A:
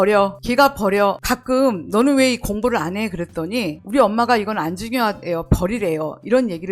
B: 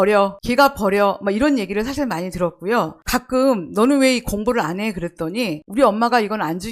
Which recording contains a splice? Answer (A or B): A